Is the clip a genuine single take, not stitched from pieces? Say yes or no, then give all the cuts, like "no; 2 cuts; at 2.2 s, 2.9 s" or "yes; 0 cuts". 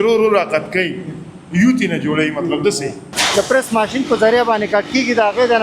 no; 1 cut; at 3.1 s